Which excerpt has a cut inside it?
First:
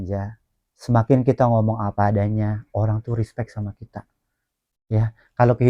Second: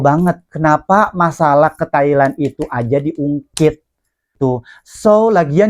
second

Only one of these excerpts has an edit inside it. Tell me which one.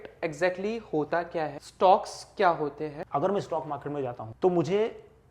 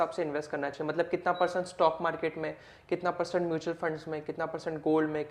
first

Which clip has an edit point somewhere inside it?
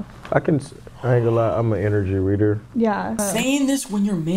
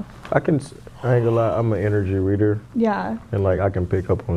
first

